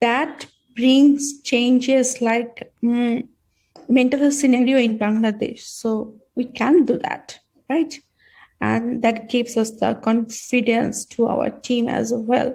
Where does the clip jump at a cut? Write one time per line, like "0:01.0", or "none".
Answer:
none